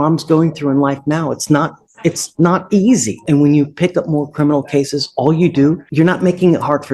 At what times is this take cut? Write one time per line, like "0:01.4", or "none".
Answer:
0:03.1
0:05.8